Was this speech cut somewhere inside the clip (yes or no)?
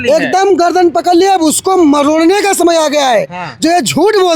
no